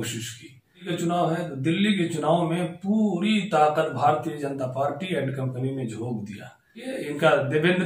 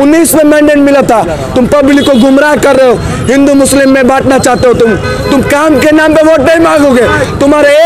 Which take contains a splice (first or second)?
first